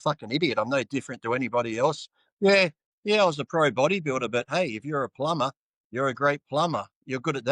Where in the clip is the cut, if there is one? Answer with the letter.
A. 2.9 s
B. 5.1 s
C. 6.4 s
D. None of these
A